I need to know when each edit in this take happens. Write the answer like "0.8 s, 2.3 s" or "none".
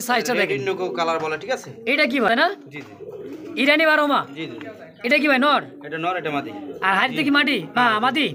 2.3 s